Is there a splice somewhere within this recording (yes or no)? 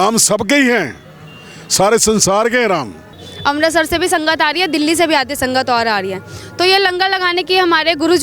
yes